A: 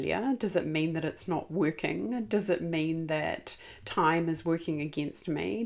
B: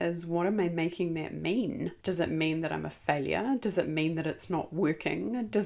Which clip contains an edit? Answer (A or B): B